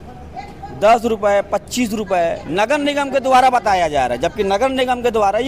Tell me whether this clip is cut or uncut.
uncut